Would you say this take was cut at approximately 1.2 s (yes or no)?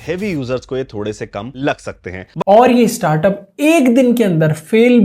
no